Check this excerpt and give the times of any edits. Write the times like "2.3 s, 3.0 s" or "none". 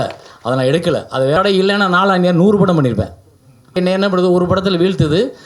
1.4 s, 3.8 s